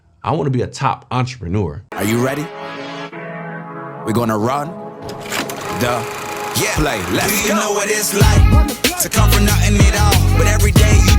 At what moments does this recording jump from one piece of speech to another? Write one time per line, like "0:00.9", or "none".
0:01.8